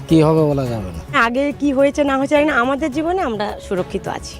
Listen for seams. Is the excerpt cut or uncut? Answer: cut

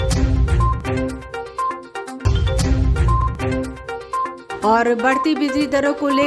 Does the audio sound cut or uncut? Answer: cut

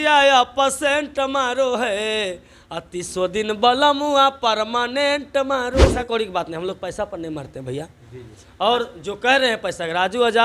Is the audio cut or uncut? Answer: cut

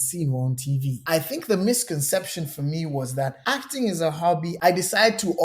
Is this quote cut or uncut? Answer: cut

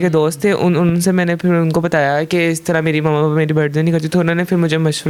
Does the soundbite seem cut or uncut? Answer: uncut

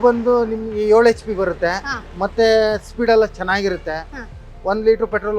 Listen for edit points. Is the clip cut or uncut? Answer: uncut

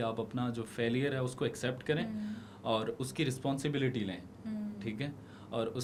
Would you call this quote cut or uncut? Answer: uncut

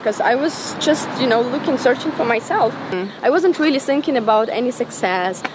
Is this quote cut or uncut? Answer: cut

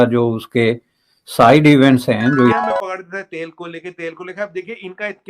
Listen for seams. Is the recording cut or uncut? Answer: cut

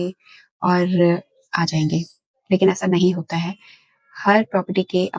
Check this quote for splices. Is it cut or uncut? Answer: uncut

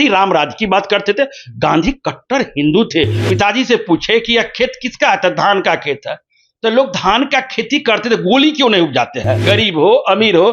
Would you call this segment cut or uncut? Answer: cut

